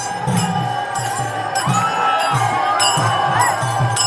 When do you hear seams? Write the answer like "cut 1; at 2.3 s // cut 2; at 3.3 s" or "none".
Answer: none